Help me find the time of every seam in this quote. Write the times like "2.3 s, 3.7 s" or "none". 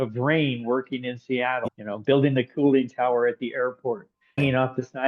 1.6 s, 4.4 s